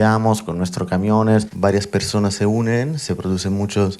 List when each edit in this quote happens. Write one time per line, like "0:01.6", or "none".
0:01.5